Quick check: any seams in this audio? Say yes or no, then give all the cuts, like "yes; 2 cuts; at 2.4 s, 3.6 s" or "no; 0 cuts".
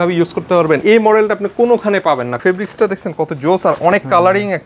yes; 2 cuts; at 0.8 s, 2.4 s